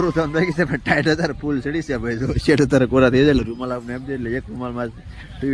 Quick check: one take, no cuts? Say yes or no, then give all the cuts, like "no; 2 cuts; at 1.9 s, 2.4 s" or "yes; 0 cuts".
yes; 0 cuts